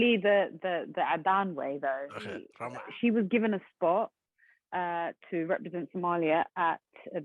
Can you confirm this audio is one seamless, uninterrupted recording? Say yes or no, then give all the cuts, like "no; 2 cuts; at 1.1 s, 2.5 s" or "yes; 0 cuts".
no; 1 cut; at 2.5 s